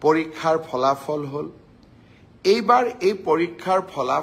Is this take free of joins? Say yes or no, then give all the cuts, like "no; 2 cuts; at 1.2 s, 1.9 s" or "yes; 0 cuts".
yes; 0 cuts